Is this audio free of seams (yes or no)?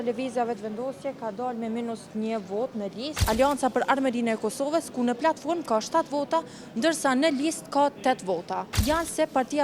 no